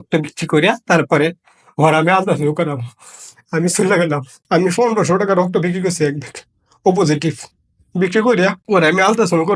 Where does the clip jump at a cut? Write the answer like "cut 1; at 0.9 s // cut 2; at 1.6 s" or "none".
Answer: cut 1; at 4.3 s // cut 2; at 8.6 s